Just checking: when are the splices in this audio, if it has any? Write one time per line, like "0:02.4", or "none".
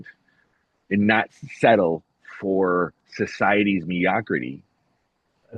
none